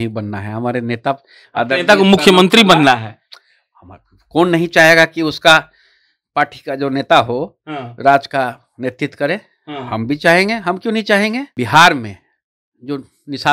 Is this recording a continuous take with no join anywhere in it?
no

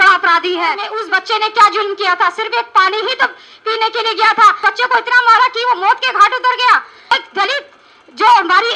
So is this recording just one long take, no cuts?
no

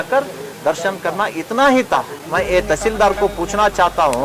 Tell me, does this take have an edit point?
yes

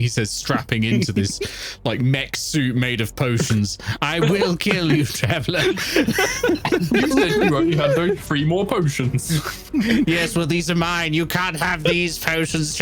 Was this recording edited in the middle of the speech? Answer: no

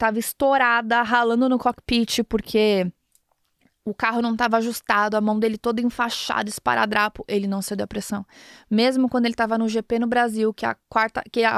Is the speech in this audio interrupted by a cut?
no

